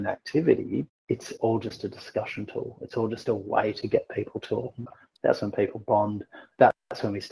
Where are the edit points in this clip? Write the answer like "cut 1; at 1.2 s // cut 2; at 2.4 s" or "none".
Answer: cut 1; at 0.9 s // cut 2; at 5.0 s